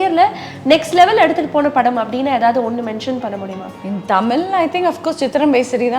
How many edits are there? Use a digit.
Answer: 1